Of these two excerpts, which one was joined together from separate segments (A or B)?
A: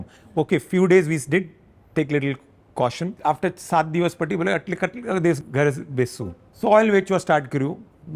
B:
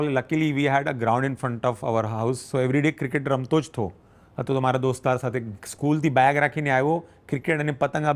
A